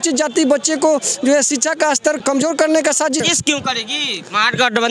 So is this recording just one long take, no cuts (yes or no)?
no